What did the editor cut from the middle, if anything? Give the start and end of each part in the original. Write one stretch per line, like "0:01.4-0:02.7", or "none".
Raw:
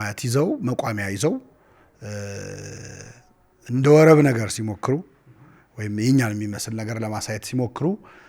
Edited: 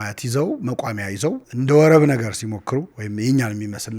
0:01.5-0:03.6
0:05.2-0:05.8